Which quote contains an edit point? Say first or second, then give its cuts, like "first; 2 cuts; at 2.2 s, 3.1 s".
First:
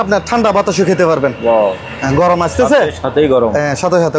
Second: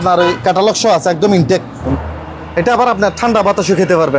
second; 1 cut; at 1.9 s